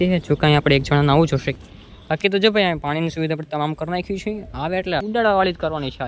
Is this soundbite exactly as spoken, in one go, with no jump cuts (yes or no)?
no